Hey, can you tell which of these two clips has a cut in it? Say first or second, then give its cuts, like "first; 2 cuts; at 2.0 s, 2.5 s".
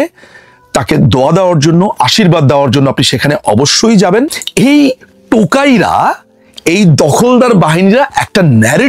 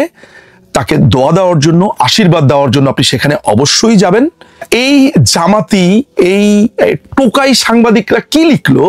first; 1 cut; at 4.4 s